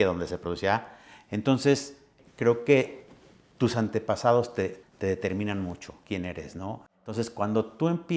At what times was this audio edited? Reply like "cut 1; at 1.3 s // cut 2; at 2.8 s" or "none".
cut 1; at 2.2 s // cut 2; at 4.8 s // cut 3; at 7.0 s